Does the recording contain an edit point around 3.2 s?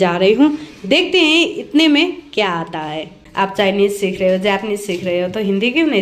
yes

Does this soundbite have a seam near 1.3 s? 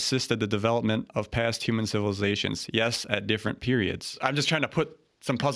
no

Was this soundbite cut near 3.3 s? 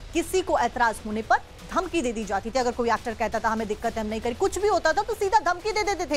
yes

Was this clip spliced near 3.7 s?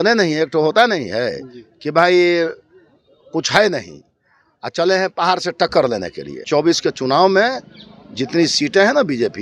no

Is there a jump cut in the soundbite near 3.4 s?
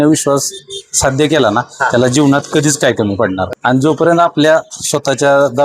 yes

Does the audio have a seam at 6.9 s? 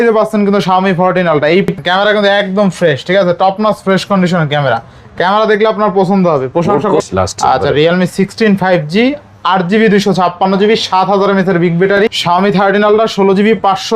yes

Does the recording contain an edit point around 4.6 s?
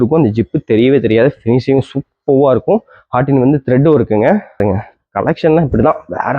yes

